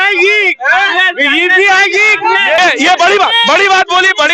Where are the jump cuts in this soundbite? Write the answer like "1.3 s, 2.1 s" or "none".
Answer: 2.6 s